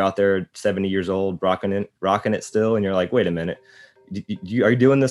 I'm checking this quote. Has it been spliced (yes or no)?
no